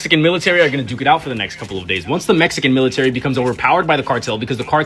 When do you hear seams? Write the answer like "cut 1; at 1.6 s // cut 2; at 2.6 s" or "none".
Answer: none